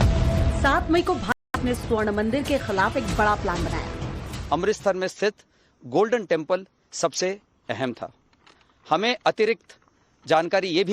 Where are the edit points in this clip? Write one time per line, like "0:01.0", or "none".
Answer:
0:01.5